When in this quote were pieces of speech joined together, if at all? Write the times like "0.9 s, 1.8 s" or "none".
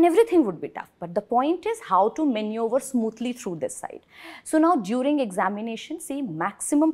none